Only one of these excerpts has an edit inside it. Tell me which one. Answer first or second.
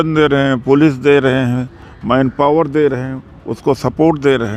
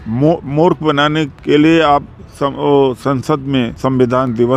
second